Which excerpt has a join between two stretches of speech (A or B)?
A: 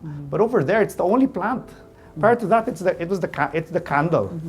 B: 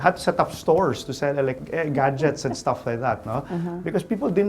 B